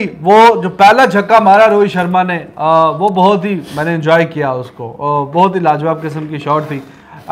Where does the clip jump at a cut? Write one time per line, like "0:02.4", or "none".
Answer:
none